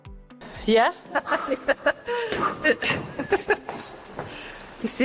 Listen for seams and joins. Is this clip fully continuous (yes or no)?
no